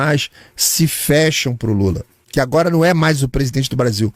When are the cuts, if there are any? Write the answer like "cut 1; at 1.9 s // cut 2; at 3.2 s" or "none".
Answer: cut 1; at 2.1 s

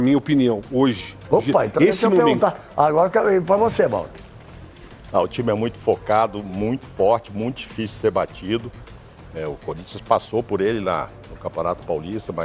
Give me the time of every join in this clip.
none

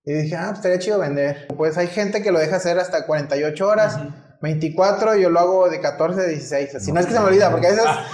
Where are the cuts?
cut 1; at 1.5 s

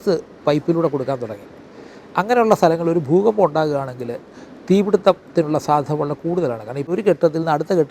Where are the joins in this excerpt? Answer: cut 1; at 6.8 s

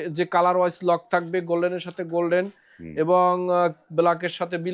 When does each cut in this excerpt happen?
none

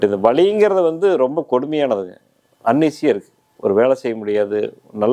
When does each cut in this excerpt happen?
none

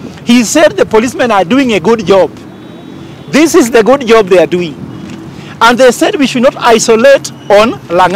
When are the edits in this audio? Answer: none

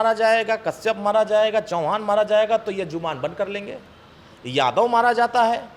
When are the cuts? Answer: none

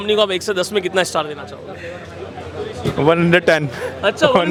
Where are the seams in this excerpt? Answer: none

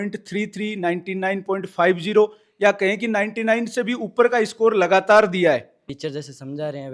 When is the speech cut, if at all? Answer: cut 1; at 5.8 s

